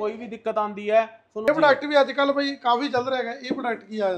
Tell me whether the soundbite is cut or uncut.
cut